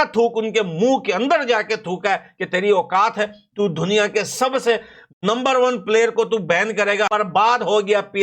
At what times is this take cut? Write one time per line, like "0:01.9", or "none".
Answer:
0:07.1